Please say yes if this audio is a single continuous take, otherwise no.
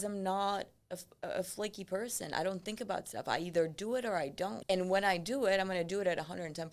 yes